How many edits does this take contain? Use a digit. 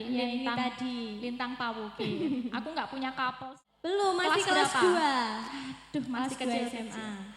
1